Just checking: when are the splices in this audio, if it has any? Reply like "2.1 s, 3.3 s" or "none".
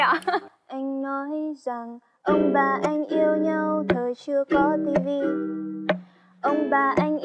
none